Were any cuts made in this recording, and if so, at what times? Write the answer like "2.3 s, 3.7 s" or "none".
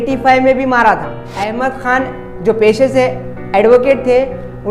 1.2 s